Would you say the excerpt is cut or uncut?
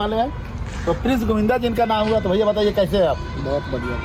uncut